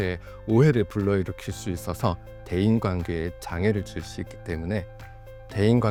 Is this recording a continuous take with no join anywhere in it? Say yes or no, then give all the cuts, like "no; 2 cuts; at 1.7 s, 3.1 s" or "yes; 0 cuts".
yes; 0 cuts